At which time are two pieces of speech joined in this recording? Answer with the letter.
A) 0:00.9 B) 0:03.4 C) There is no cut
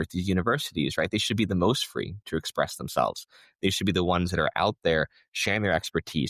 C